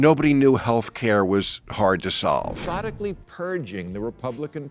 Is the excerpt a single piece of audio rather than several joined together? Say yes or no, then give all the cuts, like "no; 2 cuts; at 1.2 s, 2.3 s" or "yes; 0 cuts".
no; 1 cut; at 2.6 s